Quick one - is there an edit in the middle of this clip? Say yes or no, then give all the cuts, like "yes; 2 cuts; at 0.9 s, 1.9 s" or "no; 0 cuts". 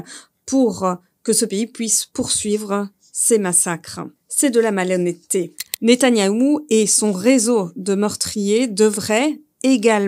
yes; 1 cut; at 5.6 s